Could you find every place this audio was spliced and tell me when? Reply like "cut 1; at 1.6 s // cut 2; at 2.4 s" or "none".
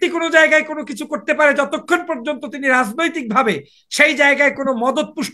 none